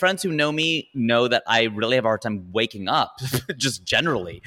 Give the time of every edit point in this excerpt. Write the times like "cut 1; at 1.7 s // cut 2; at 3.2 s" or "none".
none

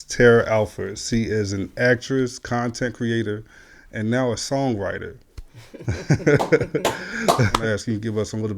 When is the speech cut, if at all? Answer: cut 1; at 7.6 s

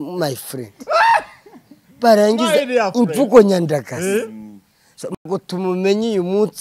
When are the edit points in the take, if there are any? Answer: cut 1; at 5.3 s

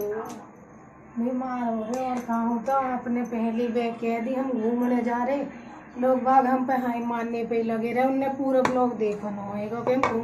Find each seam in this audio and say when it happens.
none

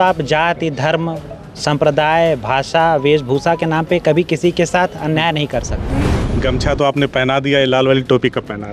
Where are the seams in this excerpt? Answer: cut 1; at 6.2 s

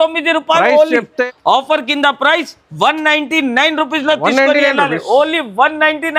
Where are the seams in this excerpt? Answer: cut 1; at 1.2 s

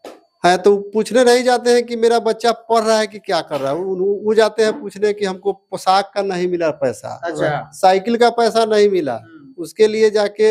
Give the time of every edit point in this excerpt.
none

